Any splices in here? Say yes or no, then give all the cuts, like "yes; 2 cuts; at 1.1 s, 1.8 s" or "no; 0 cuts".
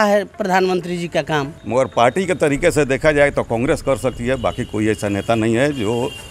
yes; 1 cut; at 1.6 s